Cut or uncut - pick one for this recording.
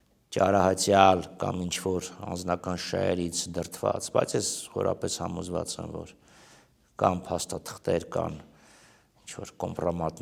uncut